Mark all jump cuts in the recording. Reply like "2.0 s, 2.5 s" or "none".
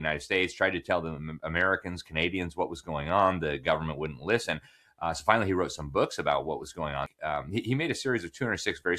7.1 s